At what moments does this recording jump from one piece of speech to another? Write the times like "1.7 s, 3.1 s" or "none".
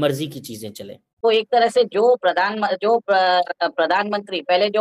1.2 s